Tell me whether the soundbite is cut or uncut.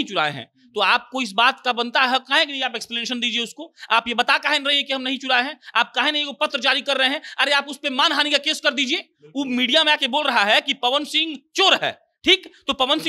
uncut